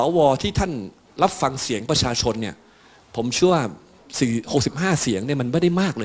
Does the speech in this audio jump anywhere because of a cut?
yes; 2 cuts; at 1.0 s, 4.0 s

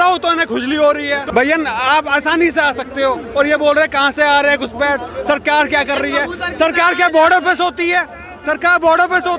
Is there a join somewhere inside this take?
yes; 1 cut; at 1.2 s

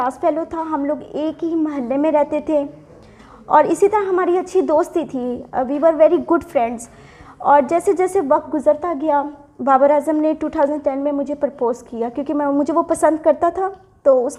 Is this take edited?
no; 0 cuts

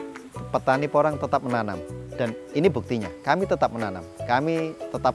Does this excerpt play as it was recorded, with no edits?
yes; 0 cuts

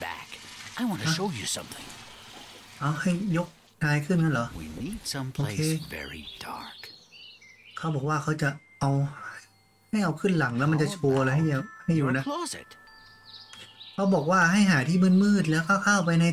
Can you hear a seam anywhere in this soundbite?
no; 0 cuts

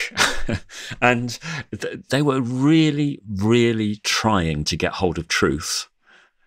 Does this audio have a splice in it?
yes; 1 cut; at 2.0 s

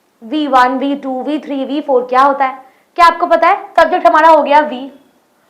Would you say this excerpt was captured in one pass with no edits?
no; 1 cut; at 3.7 s

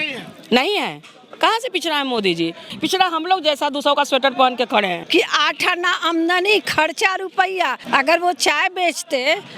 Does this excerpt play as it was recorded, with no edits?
no; 3 cuts; at 2.7 s, 5.0 s, 7.8 s

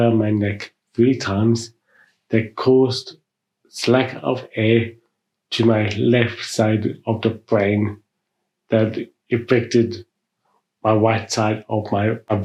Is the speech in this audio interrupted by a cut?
no; 0 cuts

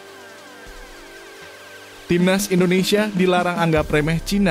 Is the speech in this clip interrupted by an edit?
yes; 1 cut; at 2.1 s

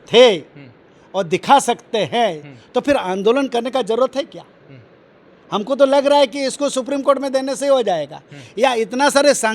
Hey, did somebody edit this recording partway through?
no; 0 cuts

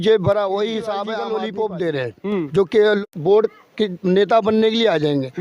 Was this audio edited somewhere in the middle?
yes; 2 cuts; at 1.1 s, 3.1 s

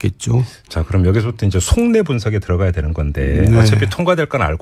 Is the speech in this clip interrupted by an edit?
no; 0 cuts

